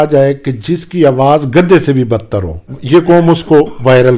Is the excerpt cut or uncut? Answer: cut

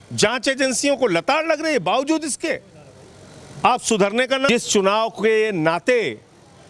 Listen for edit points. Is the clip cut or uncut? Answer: cut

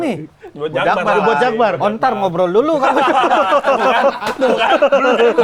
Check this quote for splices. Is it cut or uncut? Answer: uncut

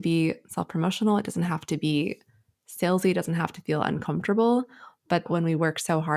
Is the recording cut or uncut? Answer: cut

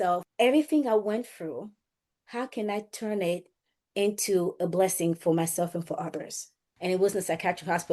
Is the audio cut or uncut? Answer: cut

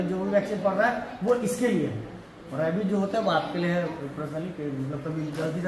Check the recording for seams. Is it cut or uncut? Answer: uncut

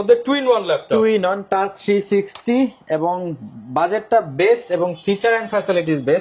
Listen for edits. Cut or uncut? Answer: uncut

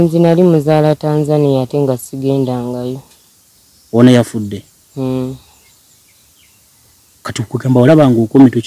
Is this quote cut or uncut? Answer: uncut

